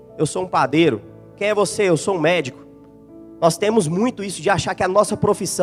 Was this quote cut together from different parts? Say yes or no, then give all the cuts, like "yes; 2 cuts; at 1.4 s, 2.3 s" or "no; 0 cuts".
no; 0 cuts